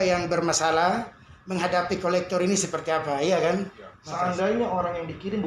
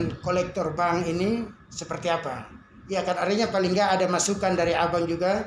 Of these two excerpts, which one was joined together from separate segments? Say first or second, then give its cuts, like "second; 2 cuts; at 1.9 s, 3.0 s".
first; 1 cut; at 3.5 s